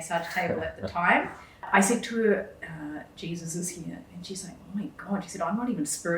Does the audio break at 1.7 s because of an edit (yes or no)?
yes